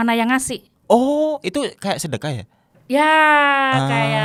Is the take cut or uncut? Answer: uncut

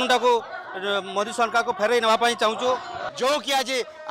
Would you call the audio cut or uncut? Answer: cut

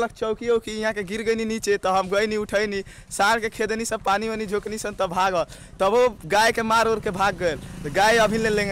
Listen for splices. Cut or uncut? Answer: uncut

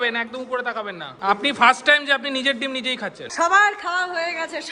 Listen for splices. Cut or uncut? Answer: cut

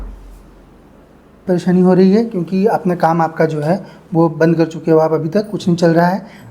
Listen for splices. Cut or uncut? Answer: uncut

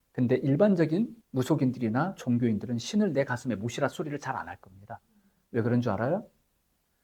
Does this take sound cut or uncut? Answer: cut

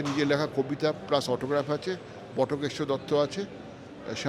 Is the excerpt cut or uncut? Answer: uncut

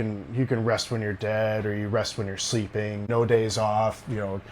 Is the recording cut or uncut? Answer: cut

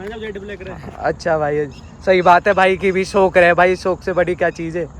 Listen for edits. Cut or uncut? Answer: uncut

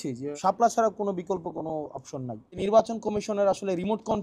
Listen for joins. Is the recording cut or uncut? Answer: cut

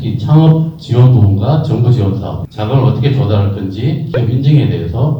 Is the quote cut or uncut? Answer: cut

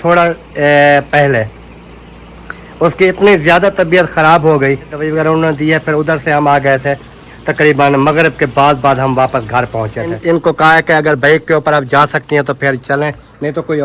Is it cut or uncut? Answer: cut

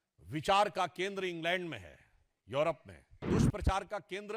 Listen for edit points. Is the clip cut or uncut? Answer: cut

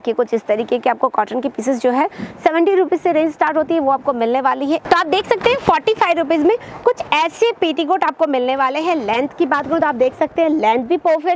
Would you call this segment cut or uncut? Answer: cut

